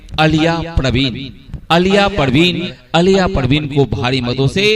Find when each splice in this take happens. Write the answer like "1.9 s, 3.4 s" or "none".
2.7 s